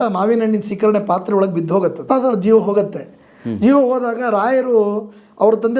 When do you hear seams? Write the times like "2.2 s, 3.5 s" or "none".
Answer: 2.0 s